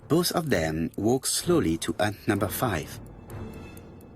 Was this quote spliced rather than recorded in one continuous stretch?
yes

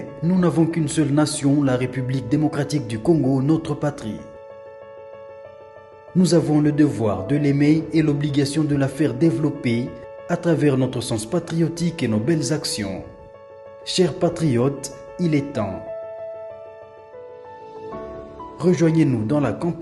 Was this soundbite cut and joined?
yes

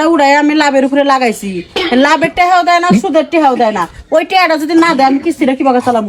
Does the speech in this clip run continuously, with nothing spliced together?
yes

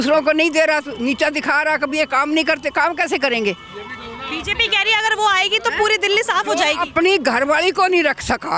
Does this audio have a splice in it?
no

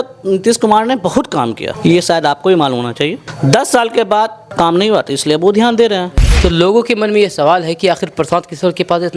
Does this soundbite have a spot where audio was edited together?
yes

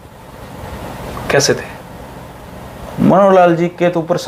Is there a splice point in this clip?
no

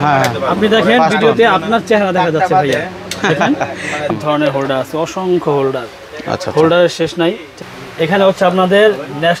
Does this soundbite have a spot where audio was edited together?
yes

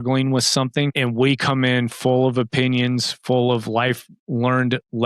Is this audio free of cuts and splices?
no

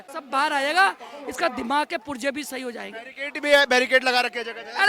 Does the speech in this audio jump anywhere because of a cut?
no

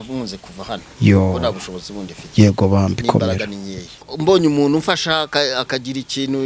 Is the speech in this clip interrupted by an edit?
yes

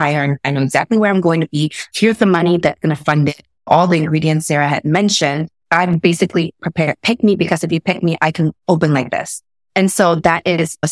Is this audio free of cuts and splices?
yes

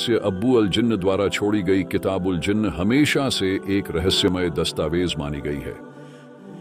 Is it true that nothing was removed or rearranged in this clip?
yes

